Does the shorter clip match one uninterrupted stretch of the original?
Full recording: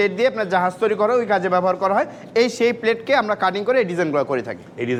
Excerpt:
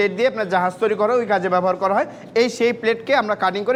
yes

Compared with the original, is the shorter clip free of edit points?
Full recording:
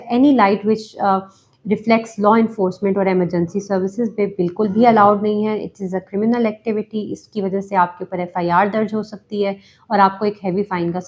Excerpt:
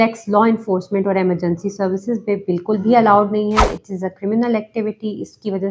yes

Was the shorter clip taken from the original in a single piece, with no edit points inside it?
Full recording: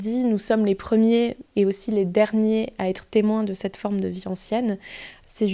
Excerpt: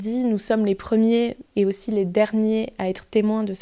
yes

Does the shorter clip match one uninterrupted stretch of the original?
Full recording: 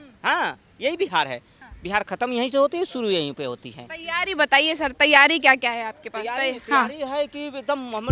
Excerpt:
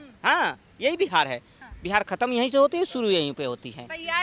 yes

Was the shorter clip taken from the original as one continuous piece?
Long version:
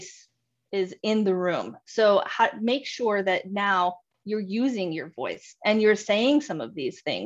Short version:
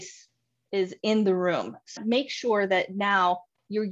no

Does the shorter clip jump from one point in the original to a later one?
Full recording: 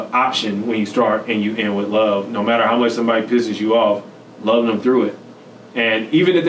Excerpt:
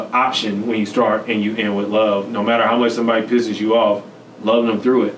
no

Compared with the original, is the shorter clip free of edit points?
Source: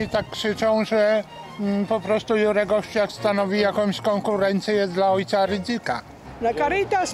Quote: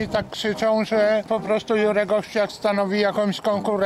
no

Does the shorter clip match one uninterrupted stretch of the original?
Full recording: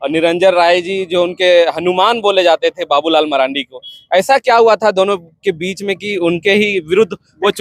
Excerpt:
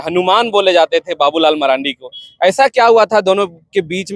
yes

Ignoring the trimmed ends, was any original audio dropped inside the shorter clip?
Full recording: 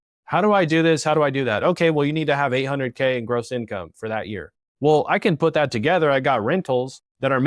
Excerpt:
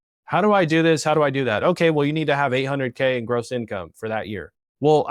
no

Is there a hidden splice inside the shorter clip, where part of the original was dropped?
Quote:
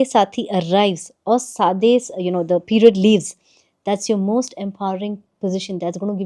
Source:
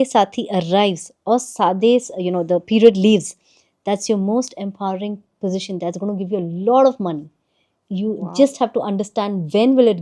no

